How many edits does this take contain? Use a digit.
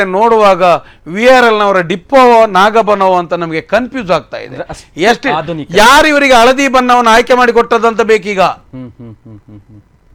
0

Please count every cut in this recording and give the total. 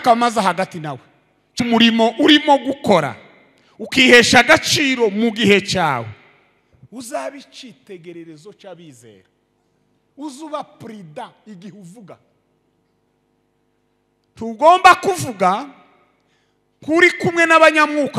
2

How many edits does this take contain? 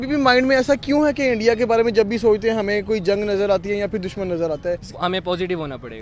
1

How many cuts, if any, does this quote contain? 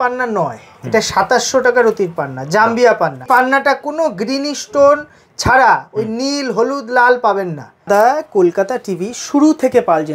2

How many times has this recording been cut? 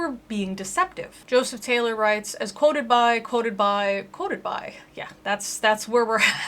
1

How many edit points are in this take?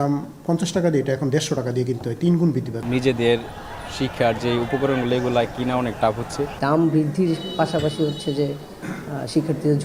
2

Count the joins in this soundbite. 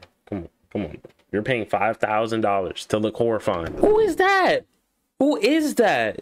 1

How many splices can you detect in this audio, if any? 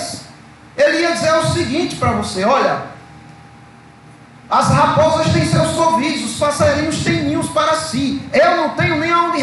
0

